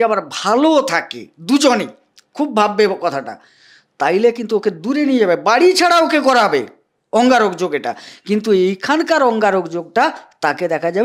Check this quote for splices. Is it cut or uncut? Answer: uncut